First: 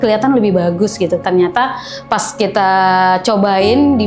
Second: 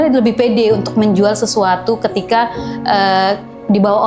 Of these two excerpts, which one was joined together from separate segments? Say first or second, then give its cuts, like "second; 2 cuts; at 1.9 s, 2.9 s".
first; 1 cut; at 1.2 s